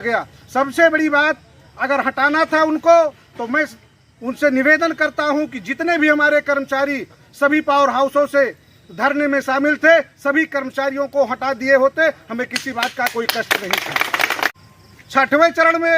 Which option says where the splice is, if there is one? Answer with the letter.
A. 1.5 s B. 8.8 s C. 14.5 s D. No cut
C